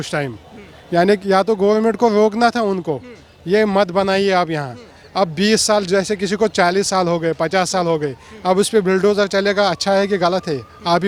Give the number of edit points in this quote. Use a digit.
0